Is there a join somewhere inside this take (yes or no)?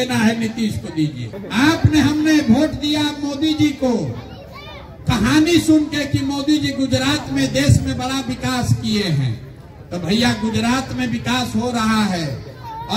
yes